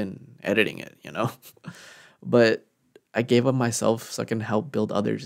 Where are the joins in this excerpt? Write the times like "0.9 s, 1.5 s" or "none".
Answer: none